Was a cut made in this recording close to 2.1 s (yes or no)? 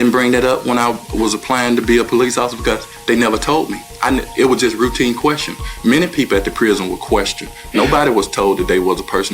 yes